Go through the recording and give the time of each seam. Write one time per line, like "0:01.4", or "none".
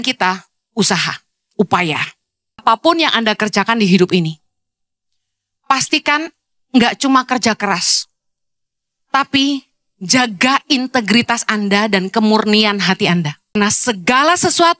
0:02.6
0:13.5